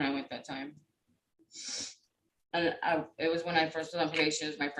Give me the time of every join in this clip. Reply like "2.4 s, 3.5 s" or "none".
none